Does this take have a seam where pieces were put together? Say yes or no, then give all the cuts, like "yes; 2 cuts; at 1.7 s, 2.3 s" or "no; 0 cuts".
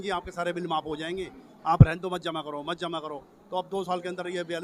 no; 0 cuts